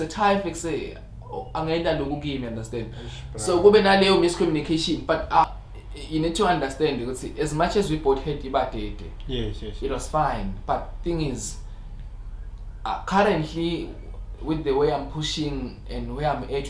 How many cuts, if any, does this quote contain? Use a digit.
1